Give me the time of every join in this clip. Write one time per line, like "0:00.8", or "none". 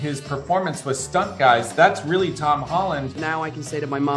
0:03.2

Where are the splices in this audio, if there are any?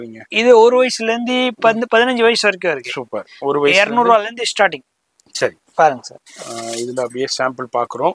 none

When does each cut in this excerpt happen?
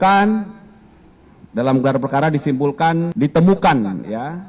0:03.1

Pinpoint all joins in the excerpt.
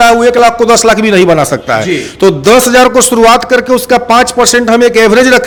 none

